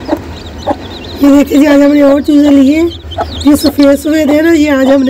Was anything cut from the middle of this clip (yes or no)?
no